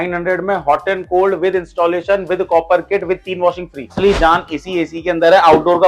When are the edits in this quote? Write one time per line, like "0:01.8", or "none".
0:03.9